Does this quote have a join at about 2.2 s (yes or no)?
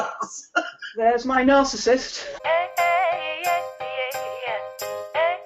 yes